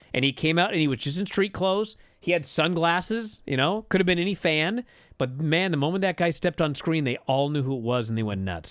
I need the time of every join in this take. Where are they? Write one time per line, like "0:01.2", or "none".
none

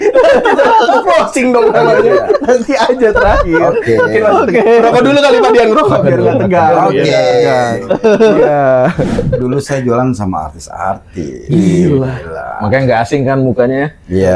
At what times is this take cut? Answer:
0:09.3

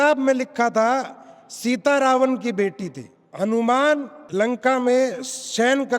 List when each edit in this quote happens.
0:03.3

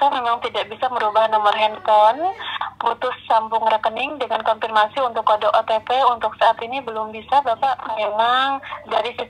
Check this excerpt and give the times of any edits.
0:07.8

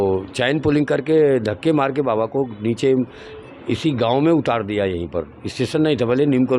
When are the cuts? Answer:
none

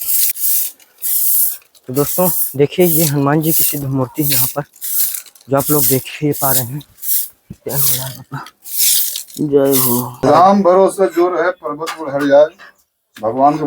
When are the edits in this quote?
0:10.2

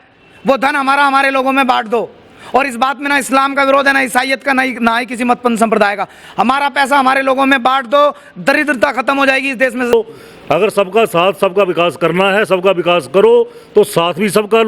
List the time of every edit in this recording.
0:09.9

